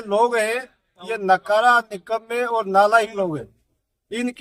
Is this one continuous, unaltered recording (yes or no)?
yes